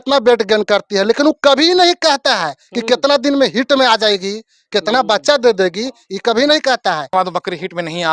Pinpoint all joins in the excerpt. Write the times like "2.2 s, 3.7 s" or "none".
7.1 s